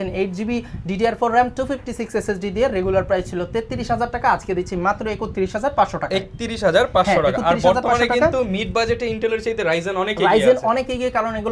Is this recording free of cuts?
yes; 0 cuts

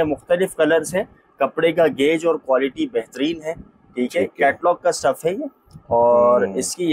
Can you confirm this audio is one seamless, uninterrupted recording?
yes; 0 cuts

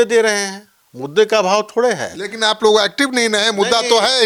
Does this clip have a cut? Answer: no; 0 cuts

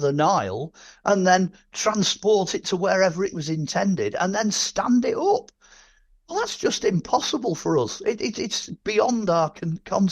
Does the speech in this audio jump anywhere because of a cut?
no; 0 cuts

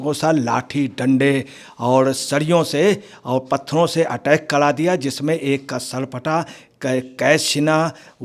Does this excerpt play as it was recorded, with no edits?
yes; 0 cuts

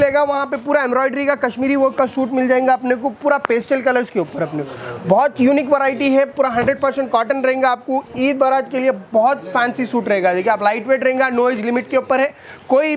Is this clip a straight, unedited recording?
yes; 0 cuts

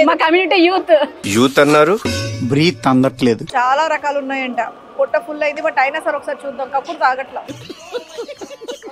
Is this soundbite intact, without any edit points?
no; 1 cut; at 3.4 s

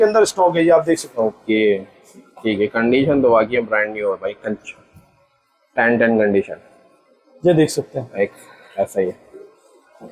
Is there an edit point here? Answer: no; 0 cuts

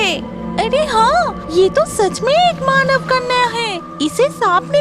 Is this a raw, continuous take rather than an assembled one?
no; 1 cut; at 1.4 s

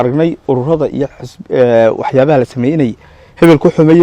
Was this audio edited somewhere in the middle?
no; 0 cuts

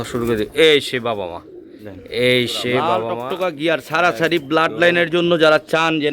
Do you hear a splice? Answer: yes; 1 cut; at 3.0 s

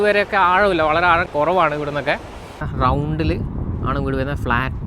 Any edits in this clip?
yes; 1 cut; at 2.7 s

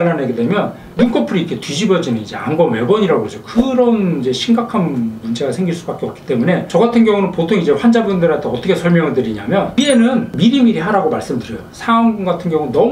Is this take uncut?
yes; 0 cuts

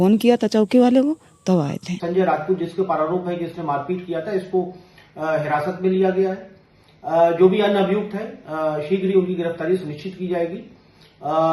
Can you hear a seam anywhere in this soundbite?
yes; 1 cut; at 1.9 s

